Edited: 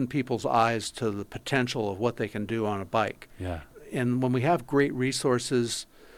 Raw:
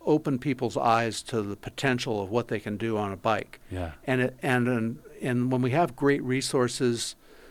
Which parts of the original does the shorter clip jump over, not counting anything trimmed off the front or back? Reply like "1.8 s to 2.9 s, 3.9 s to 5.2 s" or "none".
4.0 s to 5.0 s